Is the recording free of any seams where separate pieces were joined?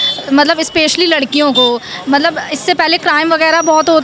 yes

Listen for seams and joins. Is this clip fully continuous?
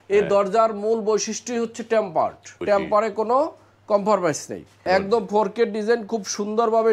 no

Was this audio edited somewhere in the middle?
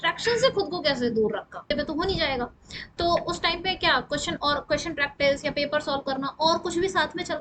yes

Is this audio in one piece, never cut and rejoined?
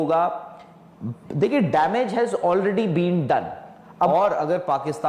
no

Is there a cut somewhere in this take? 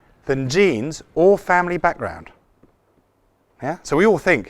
no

